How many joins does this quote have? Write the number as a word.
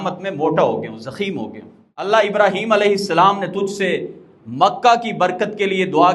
one